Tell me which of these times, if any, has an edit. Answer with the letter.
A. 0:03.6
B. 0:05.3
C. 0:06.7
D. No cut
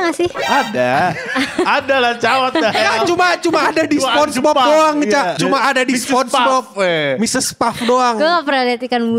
B